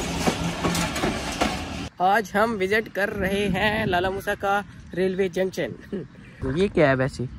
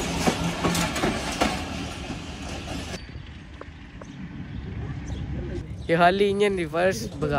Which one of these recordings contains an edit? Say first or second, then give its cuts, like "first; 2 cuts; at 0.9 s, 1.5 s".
first; 2 cuts; at 1.9 s, 6.4 s